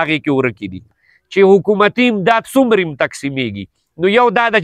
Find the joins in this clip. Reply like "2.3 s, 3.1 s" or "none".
1.0 s